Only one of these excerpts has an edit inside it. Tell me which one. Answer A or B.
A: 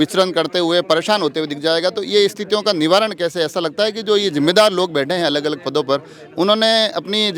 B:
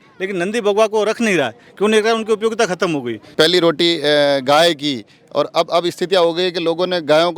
B